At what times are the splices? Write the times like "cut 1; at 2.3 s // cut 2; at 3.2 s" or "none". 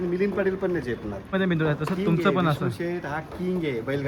cut 1; at 1.3 s